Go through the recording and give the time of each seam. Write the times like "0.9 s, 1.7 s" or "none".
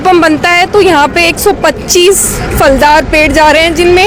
none